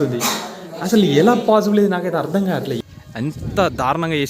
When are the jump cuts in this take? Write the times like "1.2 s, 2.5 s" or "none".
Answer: 2.8 s